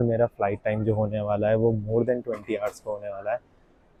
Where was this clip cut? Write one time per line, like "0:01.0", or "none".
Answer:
none